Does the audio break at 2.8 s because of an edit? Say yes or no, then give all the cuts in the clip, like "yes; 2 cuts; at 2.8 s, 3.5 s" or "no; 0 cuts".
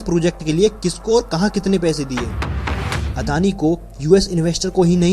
yes; 1 cut; at 2.8 s